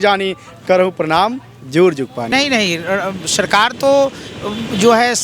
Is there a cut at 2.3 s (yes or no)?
yes